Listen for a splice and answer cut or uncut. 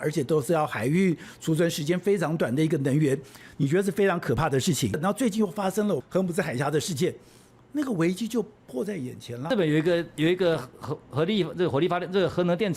cut